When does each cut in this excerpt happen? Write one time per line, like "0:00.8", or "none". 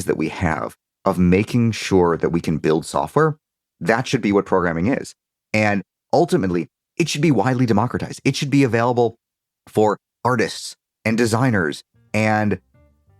0:05.9